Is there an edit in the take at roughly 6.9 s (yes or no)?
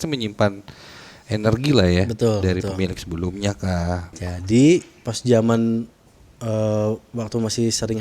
no